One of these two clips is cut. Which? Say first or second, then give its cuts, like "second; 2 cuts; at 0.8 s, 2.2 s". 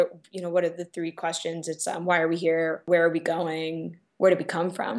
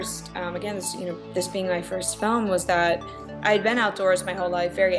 first; 2 cuts; at 2.8 s, 4.0 s